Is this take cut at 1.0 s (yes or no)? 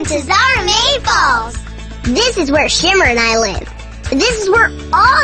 no